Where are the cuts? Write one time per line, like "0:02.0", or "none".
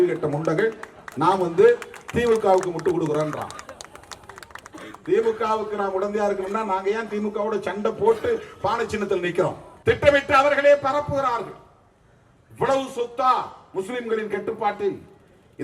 0:09.7